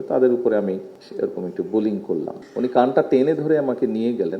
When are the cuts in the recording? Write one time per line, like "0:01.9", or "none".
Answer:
0:01.0
0:02.4